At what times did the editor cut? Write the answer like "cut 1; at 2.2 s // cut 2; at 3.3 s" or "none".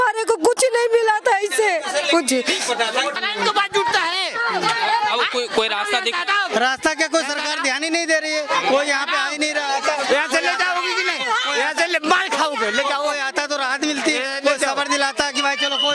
cut 1; at 3.1 s